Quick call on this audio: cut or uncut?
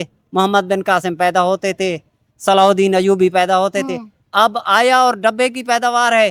uncut